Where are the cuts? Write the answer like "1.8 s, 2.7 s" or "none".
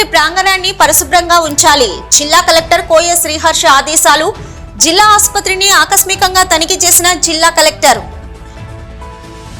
none